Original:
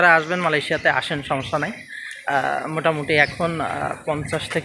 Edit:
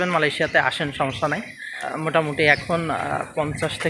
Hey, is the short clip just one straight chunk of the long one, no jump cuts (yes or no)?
no